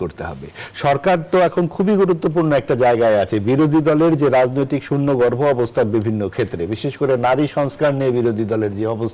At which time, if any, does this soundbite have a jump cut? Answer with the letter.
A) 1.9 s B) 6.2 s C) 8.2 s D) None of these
D